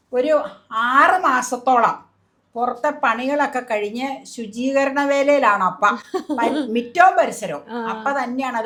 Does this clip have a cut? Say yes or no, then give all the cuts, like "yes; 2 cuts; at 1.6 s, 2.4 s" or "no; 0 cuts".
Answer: no; 0 cuts